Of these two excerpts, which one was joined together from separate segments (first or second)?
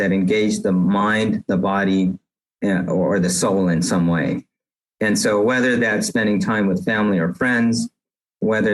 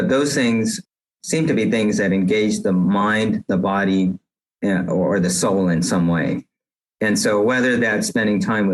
second